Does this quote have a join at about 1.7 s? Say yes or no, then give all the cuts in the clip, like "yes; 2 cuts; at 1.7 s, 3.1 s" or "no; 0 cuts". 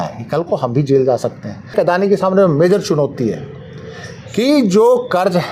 yes; 1 cut; at 1.7 s